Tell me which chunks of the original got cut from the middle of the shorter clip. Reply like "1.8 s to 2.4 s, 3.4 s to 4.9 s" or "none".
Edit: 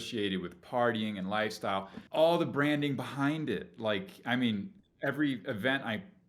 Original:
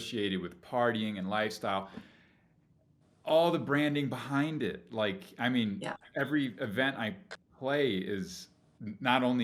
2.0 s to 3.1 s